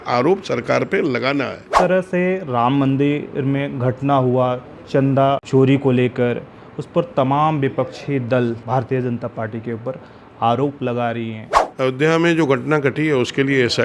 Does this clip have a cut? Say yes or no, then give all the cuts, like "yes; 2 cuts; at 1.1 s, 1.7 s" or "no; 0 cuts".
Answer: yes; 4 cuts; at 1.7 s, 5.4 s, 8.6 s, 11.6 s